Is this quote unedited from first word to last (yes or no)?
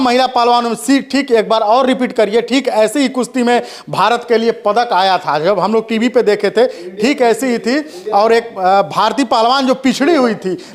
yes